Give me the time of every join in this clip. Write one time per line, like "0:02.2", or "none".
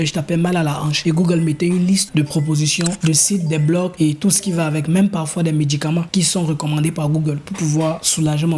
0:00.9